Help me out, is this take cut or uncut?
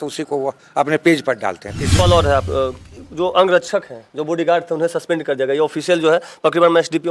cut